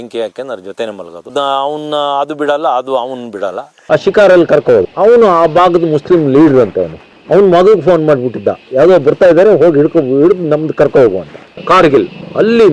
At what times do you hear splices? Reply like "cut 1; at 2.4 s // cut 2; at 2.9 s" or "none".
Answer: cut 1; at 1.3 s // cut 2; at 3.8 s // cut 3; at 11.4 s